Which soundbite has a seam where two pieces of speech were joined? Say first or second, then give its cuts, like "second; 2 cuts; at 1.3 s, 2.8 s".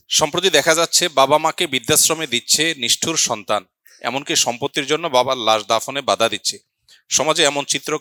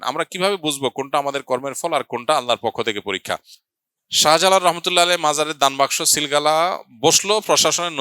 second; 2 cuts; at 3.8 s, 6.9 s